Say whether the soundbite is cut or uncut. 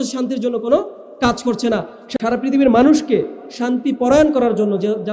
cut